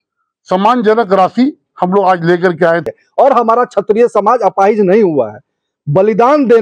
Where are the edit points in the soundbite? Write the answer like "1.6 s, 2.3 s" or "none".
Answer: 2.9 s